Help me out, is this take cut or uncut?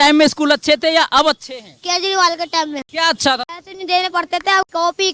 cut